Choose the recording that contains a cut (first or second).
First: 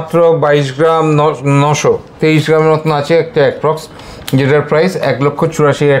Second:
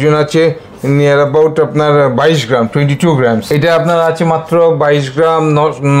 second